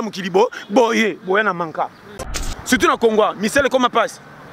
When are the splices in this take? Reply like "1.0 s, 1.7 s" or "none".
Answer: 2.5 s